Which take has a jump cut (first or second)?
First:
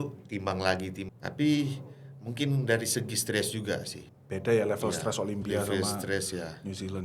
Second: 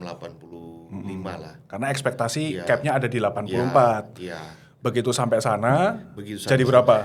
first